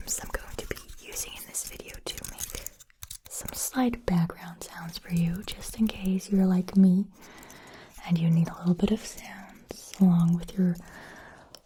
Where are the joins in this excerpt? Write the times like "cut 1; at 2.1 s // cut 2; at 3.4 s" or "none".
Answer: none